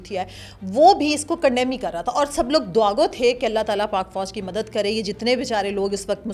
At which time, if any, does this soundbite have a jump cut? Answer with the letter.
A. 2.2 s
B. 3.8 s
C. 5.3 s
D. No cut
D